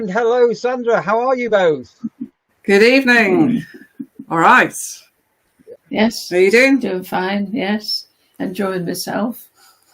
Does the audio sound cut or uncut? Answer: uncut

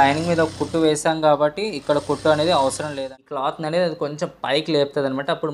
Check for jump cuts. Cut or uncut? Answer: cut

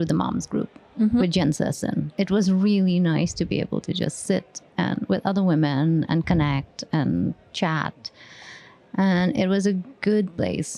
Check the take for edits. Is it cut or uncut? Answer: cut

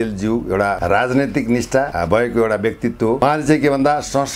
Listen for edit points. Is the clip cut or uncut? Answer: cut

